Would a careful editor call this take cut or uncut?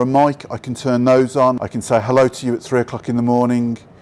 cut